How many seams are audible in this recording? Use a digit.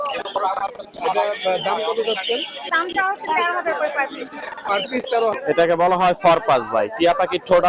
1